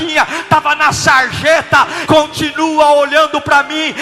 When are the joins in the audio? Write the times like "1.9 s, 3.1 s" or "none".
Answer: 2.0 s